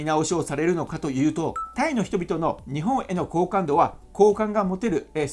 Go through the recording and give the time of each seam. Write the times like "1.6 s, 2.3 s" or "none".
1.7 s